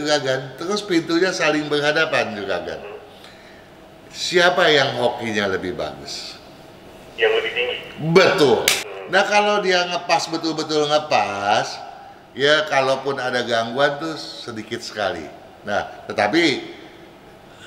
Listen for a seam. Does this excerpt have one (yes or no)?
yes